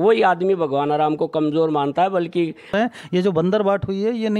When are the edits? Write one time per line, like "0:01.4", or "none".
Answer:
0:02.7